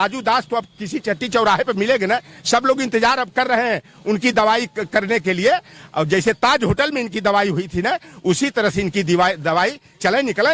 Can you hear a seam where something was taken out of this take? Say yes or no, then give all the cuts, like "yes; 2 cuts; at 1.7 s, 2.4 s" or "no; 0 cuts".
no; 0 cuts